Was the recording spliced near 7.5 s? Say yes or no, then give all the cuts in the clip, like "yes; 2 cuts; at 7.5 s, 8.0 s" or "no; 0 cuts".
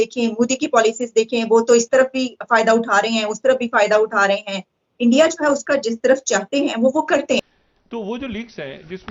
yes; 1 cut; at 7.5 s